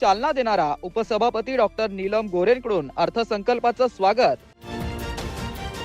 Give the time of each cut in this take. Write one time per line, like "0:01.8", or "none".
none

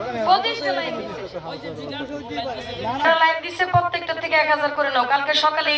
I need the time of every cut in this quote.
0:03.0

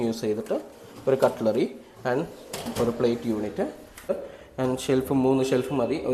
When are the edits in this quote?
0:04.1

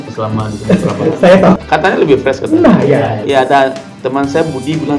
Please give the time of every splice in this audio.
0:01.6
0:03.2

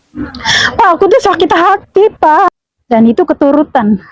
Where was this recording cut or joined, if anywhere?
0:02.5

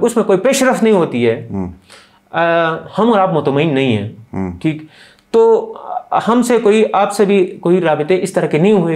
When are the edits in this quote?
none

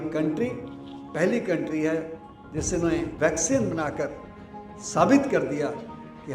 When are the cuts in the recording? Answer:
0:03.1

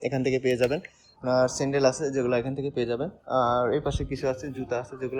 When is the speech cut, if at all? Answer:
0:01.1

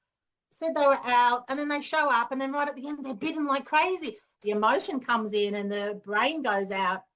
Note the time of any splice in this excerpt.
0:04.3

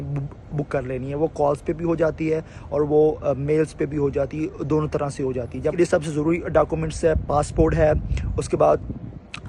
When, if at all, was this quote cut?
0:05.7

